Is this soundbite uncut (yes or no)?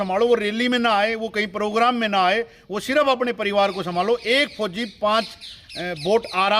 yes